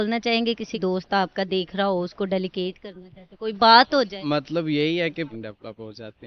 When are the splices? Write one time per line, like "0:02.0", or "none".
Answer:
0:00.8
0:05.3